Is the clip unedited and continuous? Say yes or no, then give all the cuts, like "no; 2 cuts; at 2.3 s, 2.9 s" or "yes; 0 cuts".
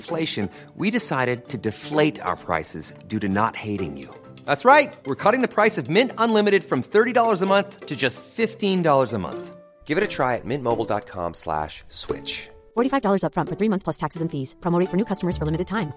yes; 0 cuts